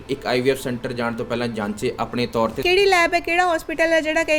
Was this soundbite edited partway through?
yes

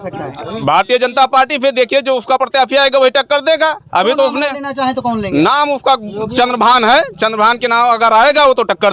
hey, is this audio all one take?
yes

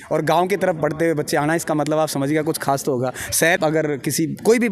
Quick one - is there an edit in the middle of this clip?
yes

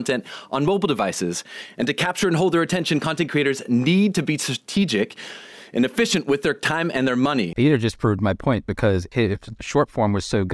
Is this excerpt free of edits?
no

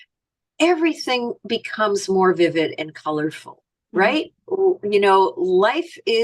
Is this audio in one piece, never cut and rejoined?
yes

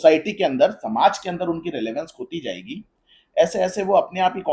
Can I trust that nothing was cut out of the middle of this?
yes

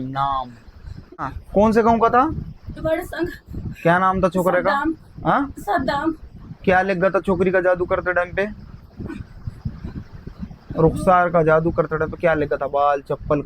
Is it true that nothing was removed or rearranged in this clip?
no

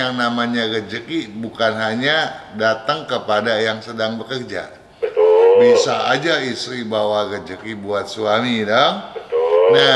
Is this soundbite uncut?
yes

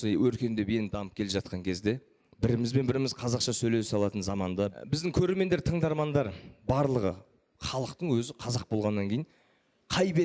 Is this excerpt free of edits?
yes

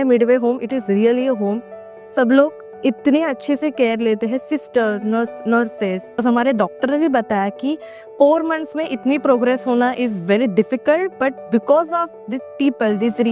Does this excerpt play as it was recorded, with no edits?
no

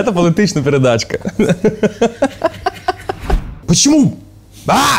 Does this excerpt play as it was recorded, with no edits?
no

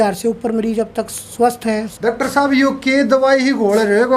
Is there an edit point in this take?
yes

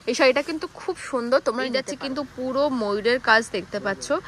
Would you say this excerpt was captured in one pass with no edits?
no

